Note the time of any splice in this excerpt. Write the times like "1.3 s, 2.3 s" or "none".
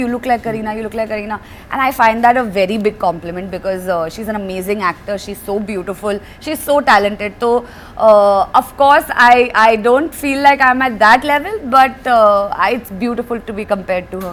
none